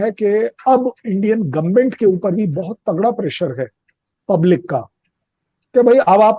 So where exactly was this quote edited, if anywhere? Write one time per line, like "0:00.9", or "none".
none